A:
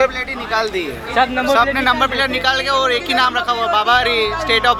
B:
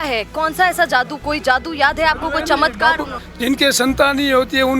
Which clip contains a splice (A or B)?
B